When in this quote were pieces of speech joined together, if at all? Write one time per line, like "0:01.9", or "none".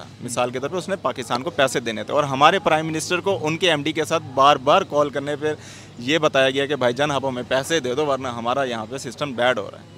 none